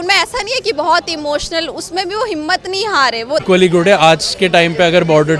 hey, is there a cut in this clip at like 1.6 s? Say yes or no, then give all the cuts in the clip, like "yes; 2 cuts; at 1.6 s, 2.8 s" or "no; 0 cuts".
no; 1 cut; at 3.4 s